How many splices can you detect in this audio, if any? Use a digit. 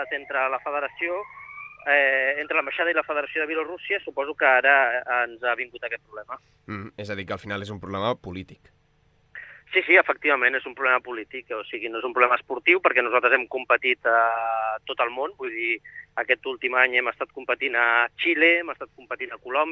1